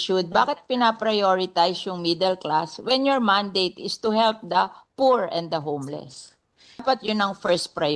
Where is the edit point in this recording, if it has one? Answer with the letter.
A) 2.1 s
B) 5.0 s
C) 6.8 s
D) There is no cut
C